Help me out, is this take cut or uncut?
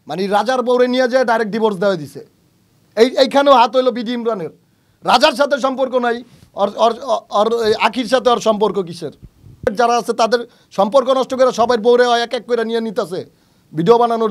cut